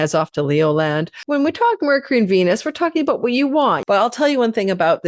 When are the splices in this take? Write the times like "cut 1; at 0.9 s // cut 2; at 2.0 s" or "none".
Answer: cut 1; at 1.1 s // cut 2; at 3.8 s